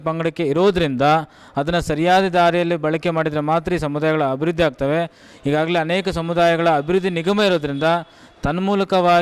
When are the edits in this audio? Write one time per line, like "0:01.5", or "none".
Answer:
none